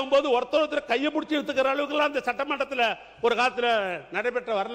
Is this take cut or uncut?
uncut